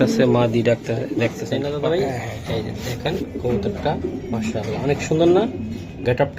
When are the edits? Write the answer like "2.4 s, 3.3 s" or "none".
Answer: 1.5 s